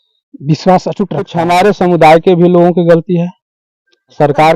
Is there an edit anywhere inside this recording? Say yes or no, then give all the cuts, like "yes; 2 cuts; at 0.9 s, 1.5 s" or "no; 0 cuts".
yes; 1 cut; at 1.2 s